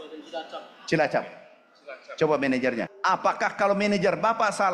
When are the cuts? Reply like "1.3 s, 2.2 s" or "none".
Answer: 2.9 s